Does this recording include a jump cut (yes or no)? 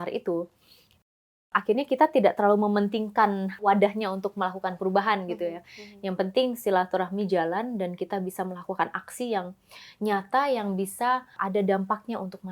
yes